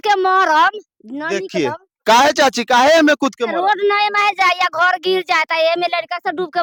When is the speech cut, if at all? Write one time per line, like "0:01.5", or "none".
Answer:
none